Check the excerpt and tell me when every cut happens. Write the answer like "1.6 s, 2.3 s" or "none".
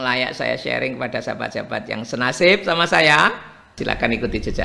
3.7 s